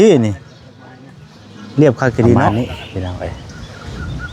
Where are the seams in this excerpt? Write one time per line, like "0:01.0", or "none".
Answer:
0:02.5

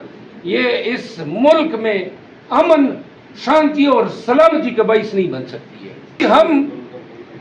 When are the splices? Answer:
0:06.1

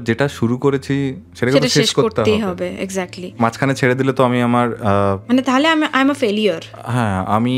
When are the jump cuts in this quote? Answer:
none

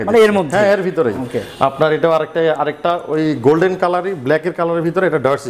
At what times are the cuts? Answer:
none

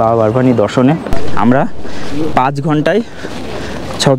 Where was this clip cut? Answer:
0:01.0

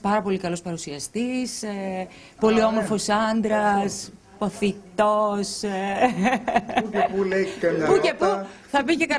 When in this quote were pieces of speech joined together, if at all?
0:04.5

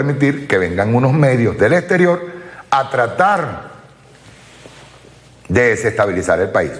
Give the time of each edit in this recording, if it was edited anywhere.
none

